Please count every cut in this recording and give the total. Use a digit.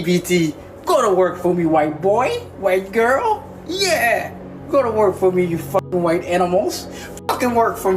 0